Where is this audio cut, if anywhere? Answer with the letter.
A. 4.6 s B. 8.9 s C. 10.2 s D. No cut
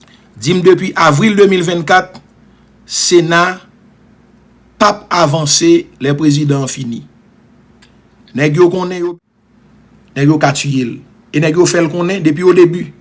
B